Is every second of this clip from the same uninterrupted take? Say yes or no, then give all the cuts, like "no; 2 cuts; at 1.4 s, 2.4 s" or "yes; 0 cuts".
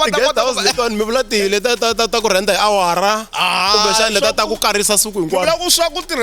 yes; 0 cuts